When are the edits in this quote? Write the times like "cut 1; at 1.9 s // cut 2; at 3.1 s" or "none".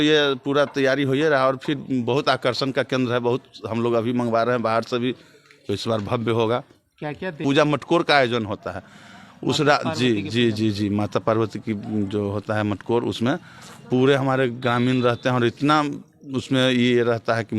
cut 1; at 7.4 s